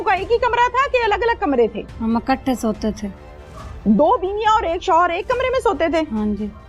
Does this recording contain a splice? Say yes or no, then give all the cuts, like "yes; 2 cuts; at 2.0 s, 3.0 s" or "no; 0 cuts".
yes; 1 cut; at 1.8 s